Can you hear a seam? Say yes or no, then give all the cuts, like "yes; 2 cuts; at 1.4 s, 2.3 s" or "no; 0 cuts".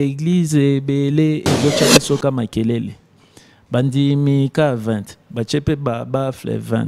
no; 0 cuts